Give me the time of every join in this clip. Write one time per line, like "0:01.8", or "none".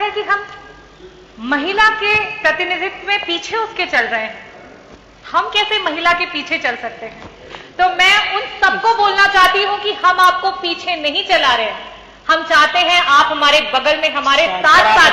none

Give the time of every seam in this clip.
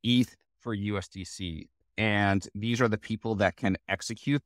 0:01.9

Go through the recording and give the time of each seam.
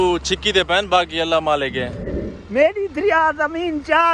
0:01.8

